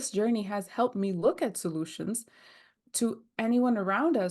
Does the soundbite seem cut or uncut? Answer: cut